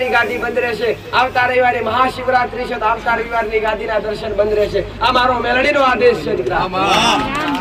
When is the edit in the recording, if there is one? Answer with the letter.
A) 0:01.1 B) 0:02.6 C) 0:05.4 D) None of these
D